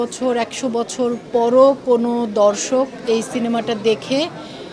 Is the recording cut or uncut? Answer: uncut